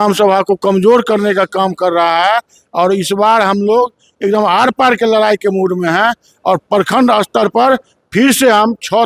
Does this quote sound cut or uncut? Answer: uncut